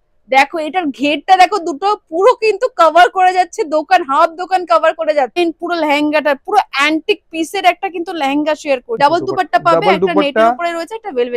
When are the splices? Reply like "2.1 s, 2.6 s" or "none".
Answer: 5.3 s, 9.0 s